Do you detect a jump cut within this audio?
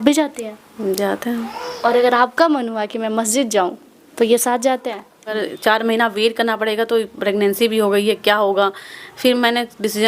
yes; 1 cut; at 5.3 s

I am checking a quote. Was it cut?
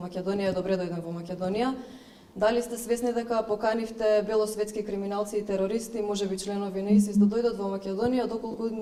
no; 0 cuts

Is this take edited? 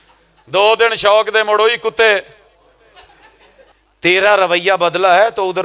yes; 1 cut; at 3.7 s

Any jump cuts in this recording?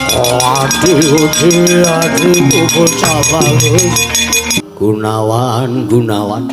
yes; 1 cut; at 4.6 s

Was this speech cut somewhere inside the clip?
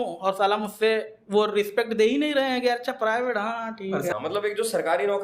yes; 1 cut; at 4.1 s

